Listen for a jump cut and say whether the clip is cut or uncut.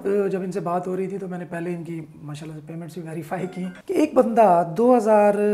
cut